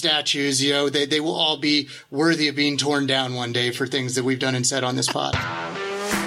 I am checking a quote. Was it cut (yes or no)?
yes